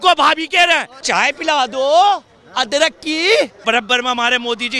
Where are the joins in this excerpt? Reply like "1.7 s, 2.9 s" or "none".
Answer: 0.9 s, 3.6 s